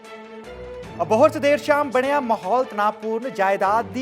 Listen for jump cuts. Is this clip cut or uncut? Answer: cut